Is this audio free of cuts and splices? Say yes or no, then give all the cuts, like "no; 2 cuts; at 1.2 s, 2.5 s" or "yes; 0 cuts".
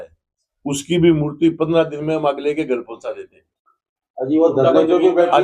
yes; 0 cuts